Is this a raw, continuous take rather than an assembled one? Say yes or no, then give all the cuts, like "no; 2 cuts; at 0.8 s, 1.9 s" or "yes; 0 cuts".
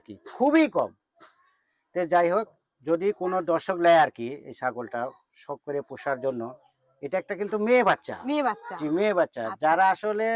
yes; 0 cuts